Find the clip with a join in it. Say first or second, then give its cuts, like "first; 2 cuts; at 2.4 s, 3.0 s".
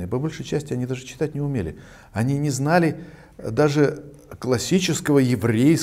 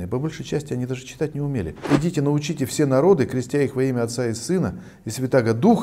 second; 1 cut; at 1.9 s